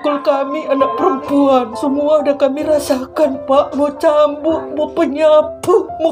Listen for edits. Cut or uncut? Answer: uncut